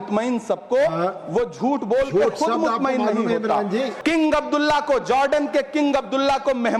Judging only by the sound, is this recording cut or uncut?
cut